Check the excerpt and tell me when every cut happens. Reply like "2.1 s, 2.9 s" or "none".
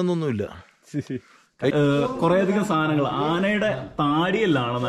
1.7 s